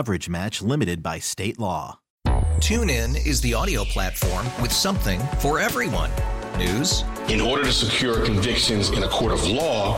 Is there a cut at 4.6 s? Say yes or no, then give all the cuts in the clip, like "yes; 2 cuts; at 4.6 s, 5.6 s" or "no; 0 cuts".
no; 1 cut; at 2.0 s